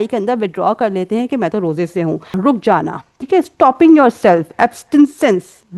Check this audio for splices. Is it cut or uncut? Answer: cut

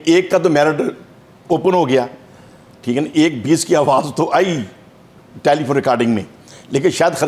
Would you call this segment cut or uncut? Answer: uncut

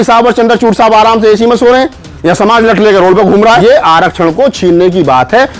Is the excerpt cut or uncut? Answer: cut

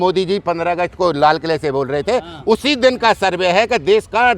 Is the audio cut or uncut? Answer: uncut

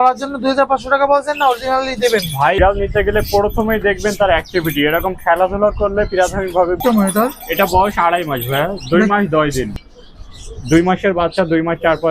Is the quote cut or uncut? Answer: cut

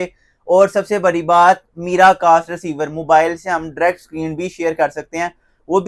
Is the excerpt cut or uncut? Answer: uncut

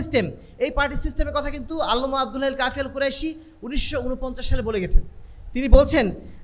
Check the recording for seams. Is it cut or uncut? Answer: uncut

